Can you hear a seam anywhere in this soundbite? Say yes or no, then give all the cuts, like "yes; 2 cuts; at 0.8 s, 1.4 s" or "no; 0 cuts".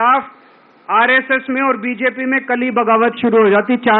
no; 0 cuts